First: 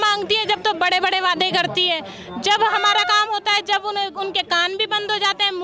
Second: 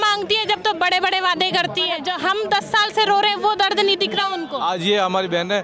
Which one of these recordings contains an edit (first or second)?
second